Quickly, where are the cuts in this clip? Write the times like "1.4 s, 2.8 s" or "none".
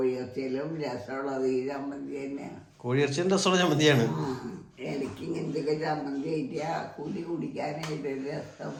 none